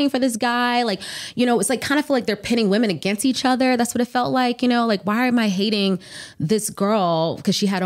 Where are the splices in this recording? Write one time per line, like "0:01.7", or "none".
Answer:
none